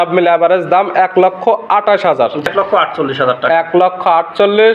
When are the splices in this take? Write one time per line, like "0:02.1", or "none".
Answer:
0:02.4